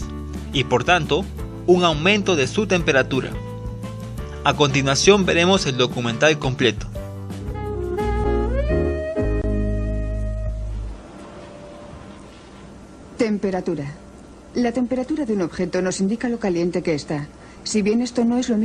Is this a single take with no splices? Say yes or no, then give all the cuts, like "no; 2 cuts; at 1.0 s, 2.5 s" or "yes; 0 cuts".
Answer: no; 1 cut; at 5.4 s